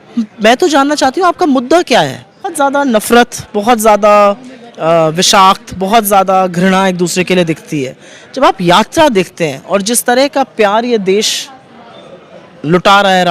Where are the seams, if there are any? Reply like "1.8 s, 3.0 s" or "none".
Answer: 2.5 s